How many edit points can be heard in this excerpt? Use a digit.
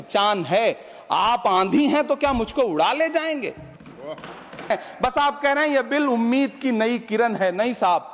1